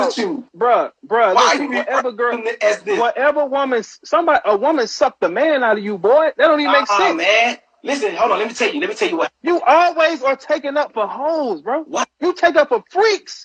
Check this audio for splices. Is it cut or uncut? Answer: cut